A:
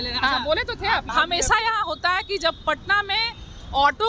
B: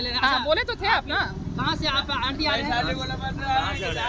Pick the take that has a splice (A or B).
A